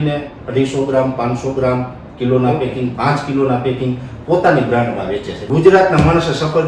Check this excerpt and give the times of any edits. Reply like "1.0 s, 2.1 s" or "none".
5.3 s